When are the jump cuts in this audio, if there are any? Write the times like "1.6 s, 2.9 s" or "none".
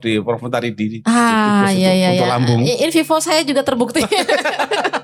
none